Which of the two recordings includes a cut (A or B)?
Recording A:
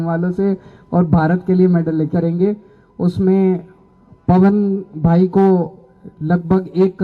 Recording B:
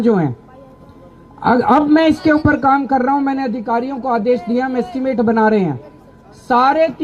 A